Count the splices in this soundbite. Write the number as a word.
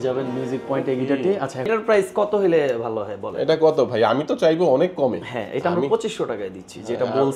one